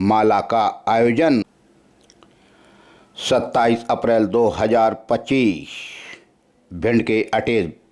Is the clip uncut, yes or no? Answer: no